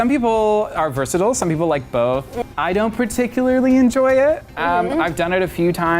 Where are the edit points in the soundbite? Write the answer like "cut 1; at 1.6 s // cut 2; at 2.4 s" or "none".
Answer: cut 1; at 2.3 s